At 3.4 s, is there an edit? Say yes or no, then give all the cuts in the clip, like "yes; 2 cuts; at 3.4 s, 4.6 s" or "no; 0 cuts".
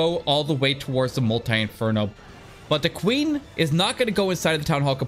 no; 1 cut; at 2.2 s